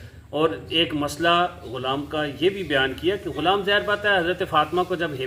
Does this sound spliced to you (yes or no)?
no